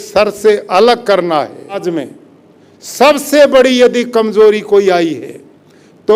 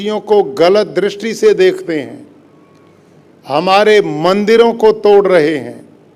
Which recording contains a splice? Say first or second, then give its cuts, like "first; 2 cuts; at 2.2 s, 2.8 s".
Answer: first; 1 cut; at 1.8 s